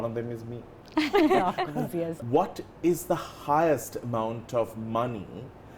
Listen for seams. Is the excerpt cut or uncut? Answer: cut